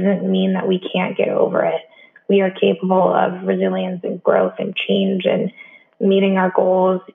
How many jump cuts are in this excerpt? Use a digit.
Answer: 0